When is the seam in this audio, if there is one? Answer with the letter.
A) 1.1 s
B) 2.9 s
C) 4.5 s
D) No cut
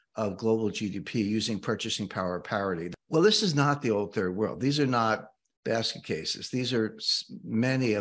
B